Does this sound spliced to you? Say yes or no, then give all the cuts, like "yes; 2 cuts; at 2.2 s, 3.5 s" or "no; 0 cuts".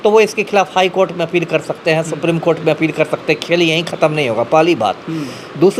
no; 0 cuts